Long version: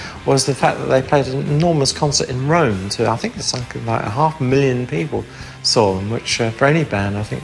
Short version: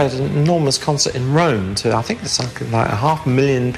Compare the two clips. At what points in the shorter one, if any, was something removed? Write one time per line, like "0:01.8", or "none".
none